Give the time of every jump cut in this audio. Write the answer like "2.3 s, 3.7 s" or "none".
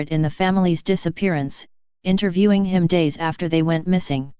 2.8 s